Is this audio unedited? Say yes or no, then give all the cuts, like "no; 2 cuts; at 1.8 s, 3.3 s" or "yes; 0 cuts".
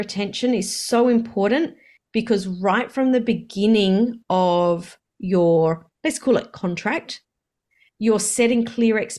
yes; 0 cuts